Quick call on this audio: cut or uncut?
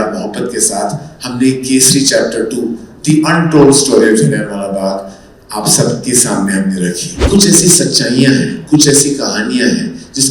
cut